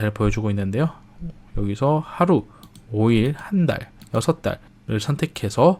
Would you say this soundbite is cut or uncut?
uncut